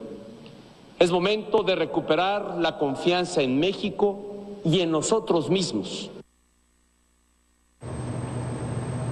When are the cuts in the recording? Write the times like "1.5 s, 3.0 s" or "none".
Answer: none